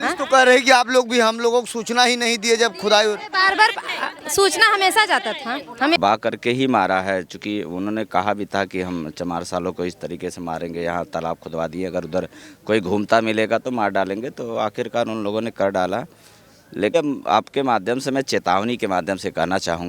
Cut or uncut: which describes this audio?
cut